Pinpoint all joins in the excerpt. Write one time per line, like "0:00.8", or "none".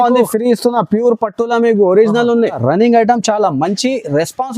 0:02.6